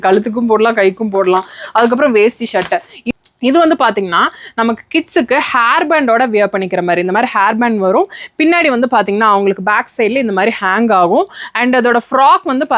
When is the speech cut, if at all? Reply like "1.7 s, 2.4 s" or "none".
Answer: 2.9 s